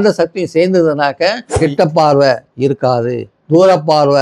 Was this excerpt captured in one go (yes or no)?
no